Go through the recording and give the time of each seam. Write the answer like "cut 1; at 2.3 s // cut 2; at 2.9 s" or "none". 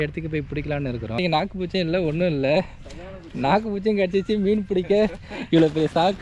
cut 1; at 1.2 s